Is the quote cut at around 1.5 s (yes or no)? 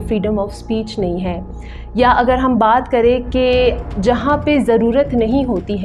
no